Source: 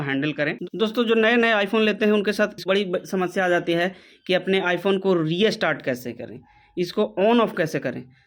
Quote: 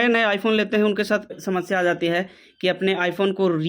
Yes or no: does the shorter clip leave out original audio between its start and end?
yes